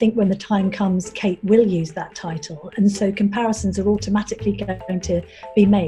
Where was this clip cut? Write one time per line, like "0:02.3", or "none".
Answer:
none